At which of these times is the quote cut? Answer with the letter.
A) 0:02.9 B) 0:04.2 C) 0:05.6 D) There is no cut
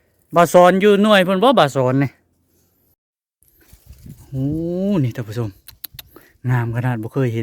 A